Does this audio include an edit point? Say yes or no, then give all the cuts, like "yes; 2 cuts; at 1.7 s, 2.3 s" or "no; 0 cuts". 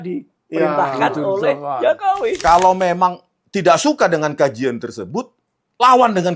yes; 1 cut; at 2.4 s